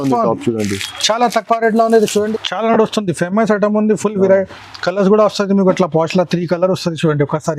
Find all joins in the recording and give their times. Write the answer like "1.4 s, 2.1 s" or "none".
2.3 s